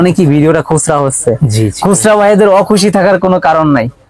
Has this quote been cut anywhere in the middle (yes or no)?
no